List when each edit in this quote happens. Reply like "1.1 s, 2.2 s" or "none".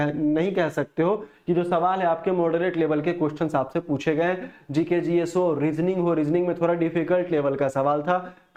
none